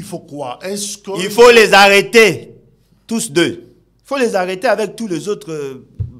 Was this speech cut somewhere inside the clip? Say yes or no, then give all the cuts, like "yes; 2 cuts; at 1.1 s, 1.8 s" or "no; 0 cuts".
no; 0 cuts